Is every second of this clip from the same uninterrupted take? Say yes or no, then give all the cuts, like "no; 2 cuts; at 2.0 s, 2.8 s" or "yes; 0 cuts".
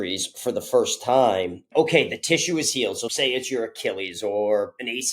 no; 2 cuts; at 1.6 s, 3.1 s